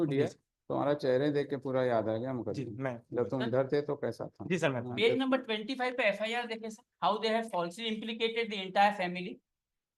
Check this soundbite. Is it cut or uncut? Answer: uncut